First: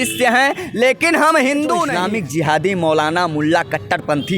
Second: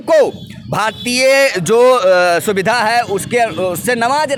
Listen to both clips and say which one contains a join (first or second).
first